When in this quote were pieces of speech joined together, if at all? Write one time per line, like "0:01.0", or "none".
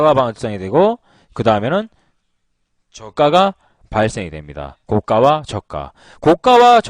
0:04.2